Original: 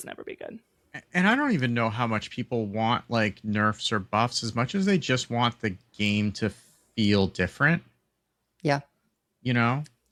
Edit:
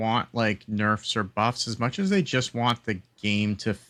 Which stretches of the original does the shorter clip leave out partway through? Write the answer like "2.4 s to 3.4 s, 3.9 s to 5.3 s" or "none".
none